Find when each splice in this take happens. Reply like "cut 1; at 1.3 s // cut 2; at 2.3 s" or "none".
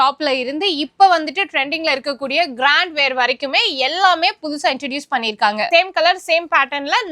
cut 1; at 5.7 s